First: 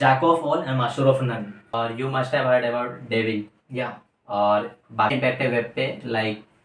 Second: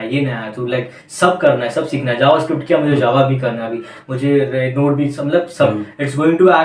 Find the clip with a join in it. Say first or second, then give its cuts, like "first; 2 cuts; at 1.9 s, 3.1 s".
first; 2 cuts; at 1.7 s, 5.1 s